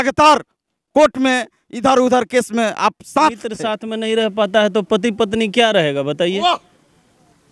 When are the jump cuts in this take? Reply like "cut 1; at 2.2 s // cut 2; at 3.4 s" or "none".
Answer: cut 1; at 3.7 s